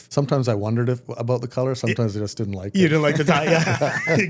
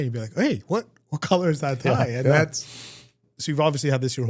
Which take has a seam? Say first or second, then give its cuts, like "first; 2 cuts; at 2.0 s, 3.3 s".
second; 1 cut; at 3.2 s